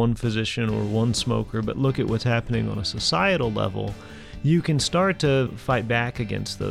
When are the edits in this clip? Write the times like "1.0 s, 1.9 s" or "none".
5.6 s